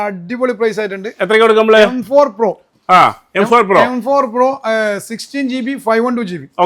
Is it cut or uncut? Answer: uncut